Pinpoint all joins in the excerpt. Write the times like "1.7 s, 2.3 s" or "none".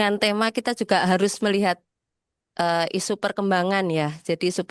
none